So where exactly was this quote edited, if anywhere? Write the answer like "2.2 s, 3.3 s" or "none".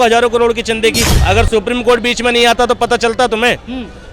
1.2 s

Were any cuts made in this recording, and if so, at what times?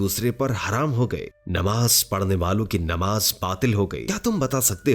4.0 s

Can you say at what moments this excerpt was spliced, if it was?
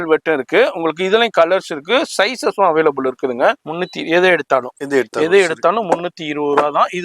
3.7 s

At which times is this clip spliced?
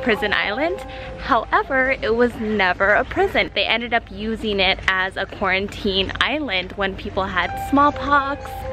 none

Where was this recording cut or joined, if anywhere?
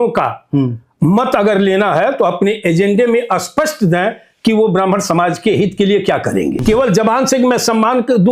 6.6 s

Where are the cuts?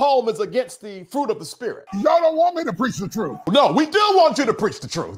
1.8 s, 3.4 s

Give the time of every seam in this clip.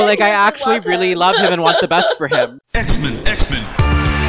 2.6 s

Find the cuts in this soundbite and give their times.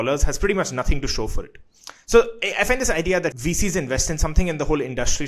3.4 s

